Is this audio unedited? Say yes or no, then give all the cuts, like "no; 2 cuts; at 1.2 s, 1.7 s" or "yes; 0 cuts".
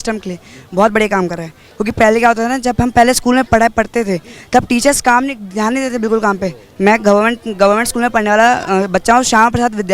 yes; 0 cuts